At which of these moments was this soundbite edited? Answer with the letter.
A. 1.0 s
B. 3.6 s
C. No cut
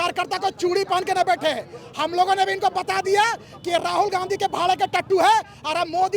C